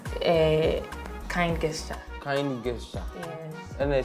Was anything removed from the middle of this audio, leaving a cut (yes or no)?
no